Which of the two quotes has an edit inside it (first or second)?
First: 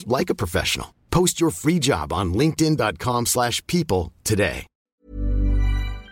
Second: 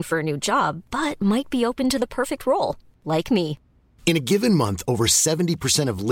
first